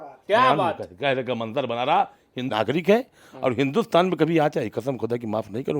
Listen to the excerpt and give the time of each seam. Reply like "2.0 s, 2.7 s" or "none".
2.5 s